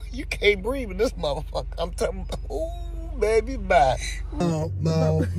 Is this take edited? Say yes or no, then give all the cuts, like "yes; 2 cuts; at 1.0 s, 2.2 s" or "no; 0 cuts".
yes; 1 cut; at 4.4 s